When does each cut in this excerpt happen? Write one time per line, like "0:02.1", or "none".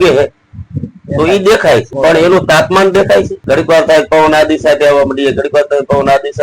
0:01.9
0:03.4